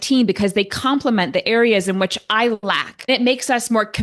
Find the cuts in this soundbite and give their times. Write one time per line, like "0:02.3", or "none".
0:02.9